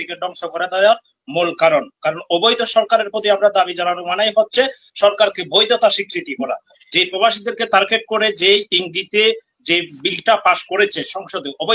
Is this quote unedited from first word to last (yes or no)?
yes